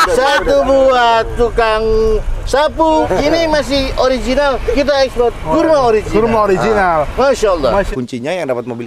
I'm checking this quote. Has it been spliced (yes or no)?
yes